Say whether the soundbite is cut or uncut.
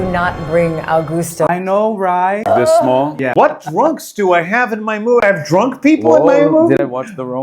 cut